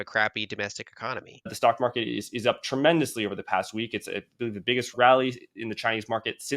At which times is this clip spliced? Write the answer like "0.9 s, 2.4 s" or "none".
1.5 s, 4.9 s